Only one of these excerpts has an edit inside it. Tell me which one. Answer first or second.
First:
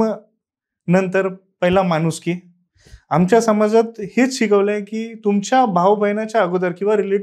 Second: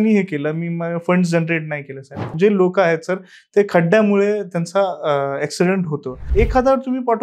second